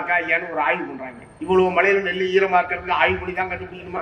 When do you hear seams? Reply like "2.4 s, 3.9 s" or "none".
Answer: none